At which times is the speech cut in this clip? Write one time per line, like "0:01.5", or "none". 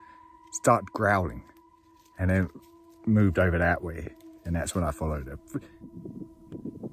0:05.4